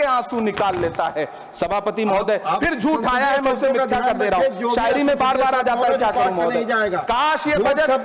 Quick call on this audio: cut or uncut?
uncut